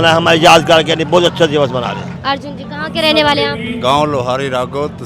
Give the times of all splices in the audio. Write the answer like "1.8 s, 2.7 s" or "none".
none